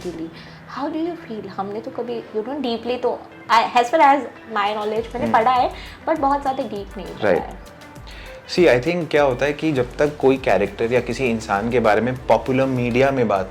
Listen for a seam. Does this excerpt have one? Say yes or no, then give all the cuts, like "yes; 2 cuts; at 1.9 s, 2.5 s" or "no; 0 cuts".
no; 0 cuts